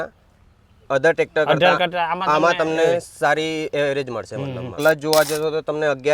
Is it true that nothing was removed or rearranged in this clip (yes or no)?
no